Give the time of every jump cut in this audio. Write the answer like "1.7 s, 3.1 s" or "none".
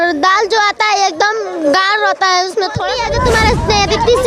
2.9 s